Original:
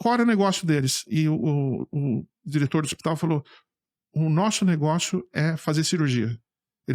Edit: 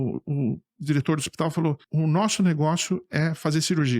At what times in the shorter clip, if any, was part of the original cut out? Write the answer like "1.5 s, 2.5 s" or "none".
1.8 s